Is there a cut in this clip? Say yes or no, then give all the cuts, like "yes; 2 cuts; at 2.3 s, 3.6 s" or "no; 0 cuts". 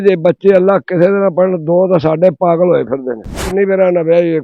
yes; 1 cut; at 3.4 s